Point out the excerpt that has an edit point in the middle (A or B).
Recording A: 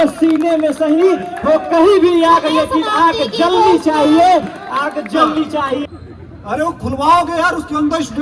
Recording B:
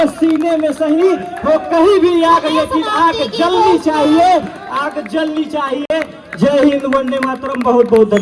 A